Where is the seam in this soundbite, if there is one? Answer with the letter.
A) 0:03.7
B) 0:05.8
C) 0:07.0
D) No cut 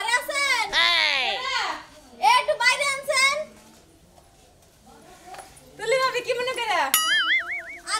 D